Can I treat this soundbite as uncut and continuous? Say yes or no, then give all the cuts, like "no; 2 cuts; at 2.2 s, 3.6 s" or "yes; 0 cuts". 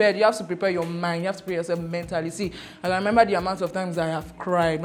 yes; 0 cuts